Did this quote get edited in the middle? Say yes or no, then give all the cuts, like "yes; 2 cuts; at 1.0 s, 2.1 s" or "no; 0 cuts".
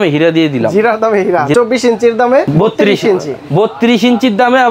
yes; 2 cuts; at 1.5 s, 2.5 s